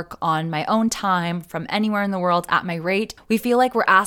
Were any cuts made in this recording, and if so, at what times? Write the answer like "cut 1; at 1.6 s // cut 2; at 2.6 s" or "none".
cut 1; at 3.2 s